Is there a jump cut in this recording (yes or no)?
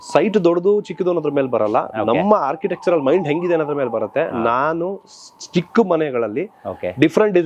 no